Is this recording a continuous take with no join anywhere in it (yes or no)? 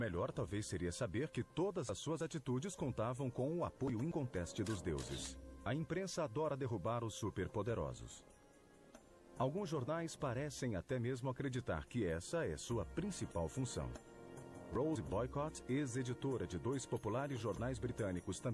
no